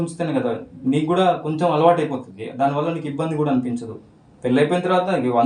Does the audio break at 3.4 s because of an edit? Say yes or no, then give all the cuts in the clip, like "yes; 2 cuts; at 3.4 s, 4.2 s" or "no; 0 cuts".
no; 0 cuts